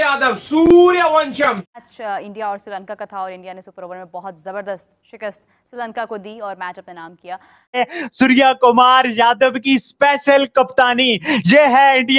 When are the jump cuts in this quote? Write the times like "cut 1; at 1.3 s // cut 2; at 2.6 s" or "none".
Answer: cut 1; at 1.7 s // cut 2; at 7.8 s